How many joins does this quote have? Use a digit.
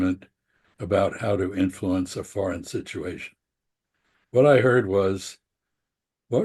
0